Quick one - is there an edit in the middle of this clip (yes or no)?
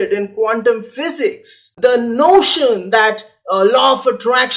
yes